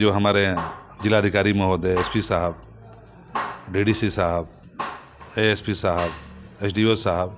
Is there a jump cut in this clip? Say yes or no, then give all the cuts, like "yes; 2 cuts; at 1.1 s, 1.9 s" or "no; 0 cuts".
no; 0 cuts